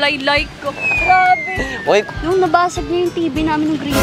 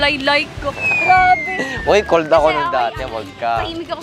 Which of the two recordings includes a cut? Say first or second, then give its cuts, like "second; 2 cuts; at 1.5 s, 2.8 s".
first; 1 cut; at 2.1 s